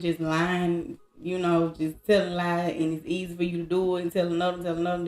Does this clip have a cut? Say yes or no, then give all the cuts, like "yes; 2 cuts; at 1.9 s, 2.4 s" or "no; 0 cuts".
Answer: no; 0 cuts